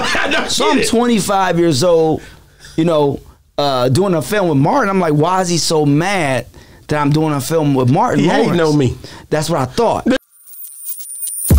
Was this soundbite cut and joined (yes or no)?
yes